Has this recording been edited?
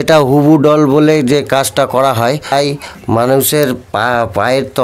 yes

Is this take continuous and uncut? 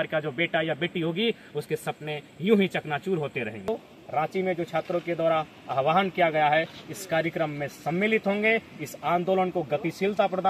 no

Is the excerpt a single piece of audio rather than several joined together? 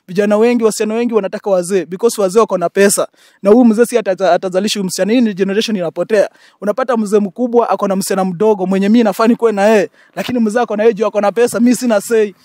yes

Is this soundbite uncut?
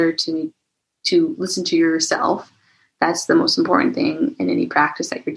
yes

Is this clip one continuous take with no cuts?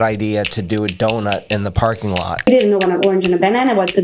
no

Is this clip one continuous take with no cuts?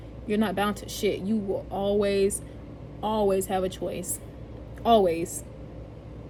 yes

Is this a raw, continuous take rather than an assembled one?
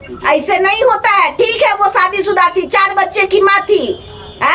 yes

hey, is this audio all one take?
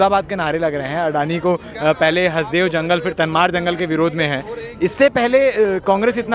yes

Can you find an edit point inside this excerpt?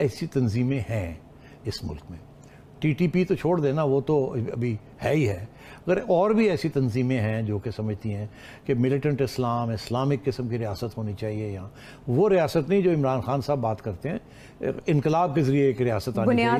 no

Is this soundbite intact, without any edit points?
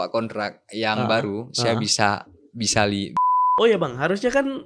no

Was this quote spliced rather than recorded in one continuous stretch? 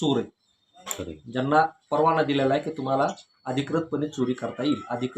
no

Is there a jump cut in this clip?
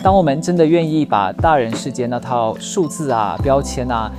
no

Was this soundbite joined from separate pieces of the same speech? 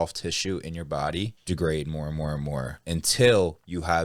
yes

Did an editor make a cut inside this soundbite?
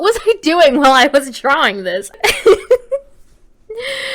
yes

